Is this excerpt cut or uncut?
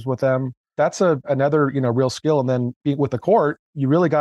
cut